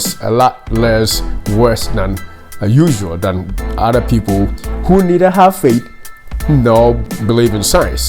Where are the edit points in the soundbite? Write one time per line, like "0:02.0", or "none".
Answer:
0:07.1